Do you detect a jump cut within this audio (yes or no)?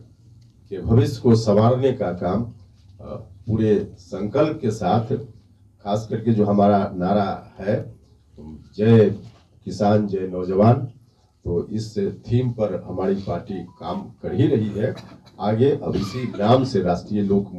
no